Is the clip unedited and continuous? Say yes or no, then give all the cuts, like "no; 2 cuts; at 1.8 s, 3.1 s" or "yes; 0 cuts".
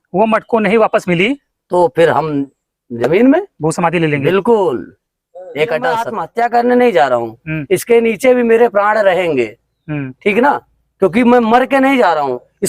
no; 1 cut; at 6.2 s